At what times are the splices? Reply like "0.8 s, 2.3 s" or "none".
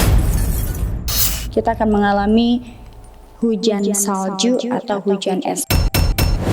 1.4 s, 5.7 s